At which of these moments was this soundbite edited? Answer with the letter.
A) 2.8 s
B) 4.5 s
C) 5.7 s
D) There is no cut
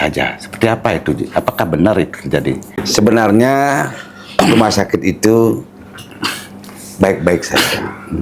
A